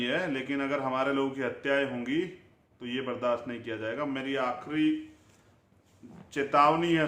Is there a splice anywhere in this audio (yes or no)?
no